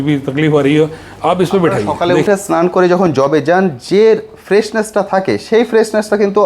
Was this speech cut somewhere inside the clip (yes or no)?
yes